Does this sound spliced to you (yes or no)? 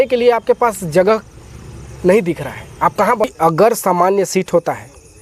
yes